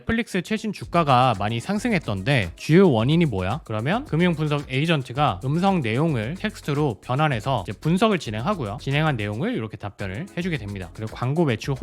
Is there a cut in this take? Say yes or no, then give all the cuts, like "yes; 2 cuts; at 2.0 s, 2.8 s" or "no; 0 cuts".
yes; 2 cuts; at 3.6 s, 10.9 s